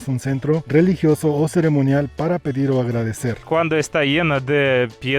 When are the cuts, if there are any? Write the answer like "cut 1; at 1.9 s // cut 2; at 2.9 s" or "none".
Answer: cut 1; at 3.5 s